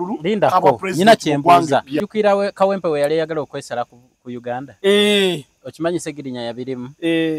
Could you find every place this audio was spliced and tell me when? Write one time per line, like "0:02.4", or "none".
0:02.0